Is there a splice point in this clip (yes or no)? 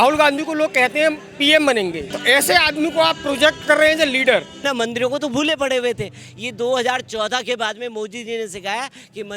yes